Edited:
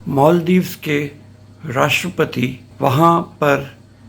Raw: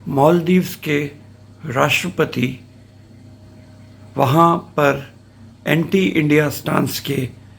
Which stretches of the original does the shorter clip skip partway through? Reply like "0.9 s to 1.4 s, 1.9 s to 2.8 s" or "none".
2.6 s to 4.0 s